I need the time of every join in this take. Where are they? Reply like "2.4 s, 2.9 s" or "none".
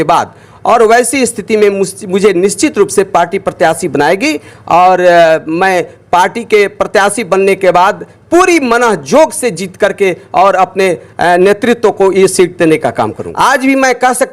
13.2 s